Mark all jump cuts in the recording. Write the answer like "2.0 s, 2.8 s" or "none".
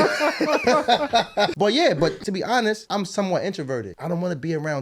1.5 s, 2.7 s, 3.9 s